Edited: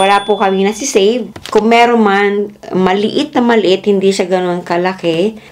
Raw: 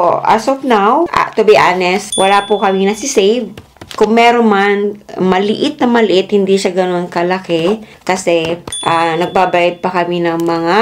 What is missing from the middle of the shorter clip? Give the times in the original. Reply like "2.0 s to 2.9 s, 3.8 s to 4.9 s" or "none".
3.6 s to 3.8 s